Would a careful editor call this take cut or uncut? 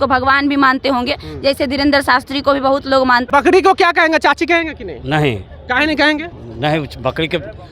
cut